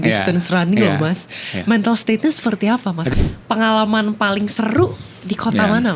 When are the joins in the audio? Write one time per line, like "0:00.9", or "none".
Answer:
0:03.1